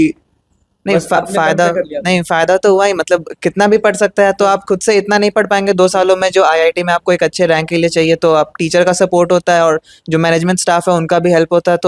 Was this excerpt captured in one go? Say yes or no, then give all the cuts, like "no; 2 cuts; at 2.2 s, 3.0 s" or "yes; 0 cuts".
yes; 0 cuts